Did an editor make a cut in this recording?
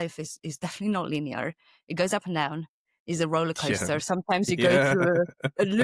no; 0 cuts

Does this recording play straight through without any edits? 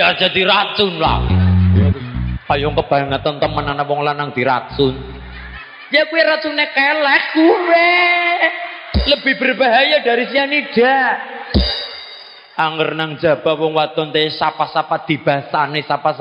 yes; 0 cuts

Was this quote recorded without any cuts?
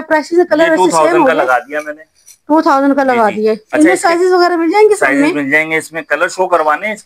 yes; 0 cuts

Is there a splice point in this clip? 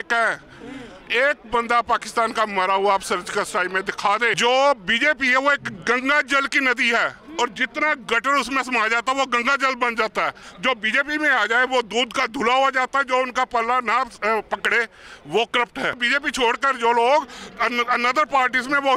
yes; 3 cuts; at 4.4 s, 10.5 s, 16.0 s

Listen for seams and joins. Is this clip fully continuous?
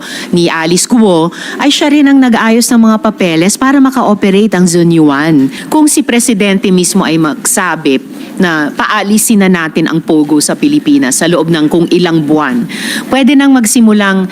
no; 1 cut; at 5.6 s

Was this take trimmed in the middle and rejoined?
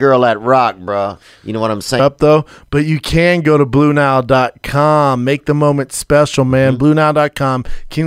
yes; 1 cut; at 2.0 s

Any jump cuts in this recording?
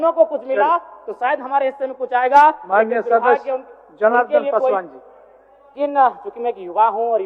yes; 1 cut; at 5.8 s

